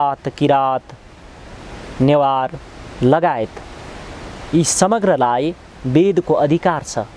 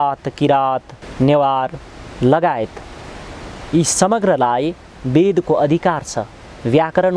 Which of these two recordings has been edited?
second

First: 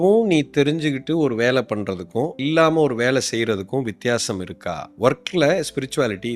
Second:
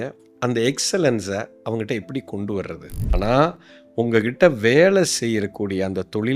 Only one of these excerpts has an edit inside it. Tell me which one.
second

